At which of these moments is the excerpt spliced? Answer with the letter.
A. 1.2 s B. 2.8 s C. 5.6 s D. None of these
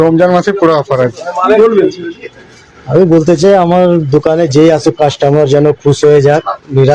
A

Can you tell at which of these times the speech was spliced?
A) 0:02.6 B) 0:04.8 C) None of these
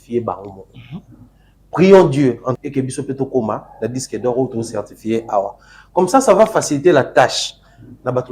A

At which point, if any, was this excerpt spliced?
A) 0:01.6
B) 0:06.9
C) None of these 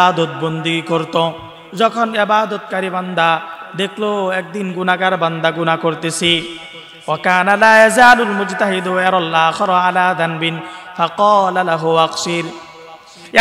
A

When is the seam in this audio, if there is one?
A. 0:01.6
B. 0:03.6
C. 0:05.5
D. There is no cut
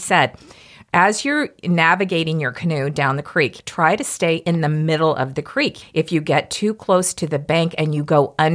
B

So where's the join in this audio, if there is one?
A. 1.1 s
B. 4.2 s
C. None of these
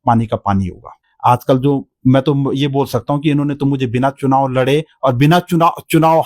A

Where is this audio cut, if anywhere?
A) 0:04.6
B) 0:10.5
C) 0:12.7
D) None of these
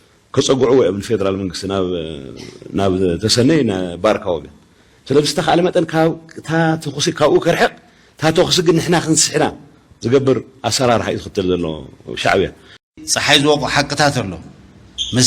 C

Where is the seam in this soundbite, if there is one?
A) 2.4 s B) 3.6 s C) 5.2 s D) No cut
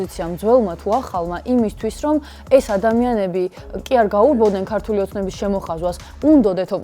D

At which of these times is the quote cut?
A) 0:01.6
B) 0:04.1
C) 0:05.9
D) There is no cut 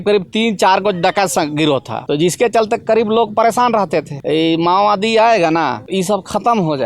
B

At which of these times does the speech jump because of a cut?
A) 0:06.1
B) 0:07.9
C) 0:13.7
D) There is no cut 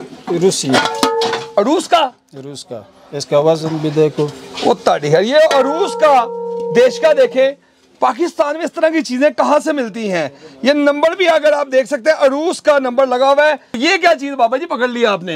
C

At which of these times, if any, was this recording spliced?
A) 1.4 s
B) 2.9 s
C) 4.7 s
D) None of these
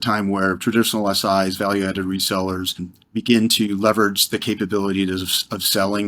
B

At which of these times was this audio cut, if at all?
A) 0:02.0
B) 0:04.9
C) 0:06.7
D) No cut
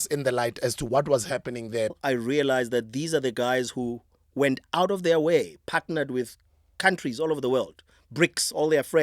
A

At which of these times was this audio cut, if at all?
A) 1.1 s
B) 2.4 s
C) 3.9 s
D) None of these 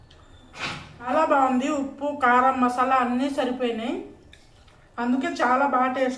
A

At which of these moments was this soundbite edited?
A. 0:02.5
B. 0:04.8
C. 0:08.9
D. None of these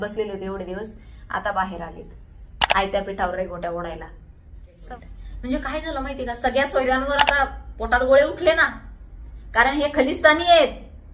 B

